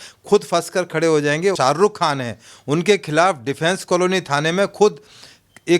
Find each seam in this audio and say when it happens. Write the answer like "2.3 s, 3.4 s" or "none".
1.5 s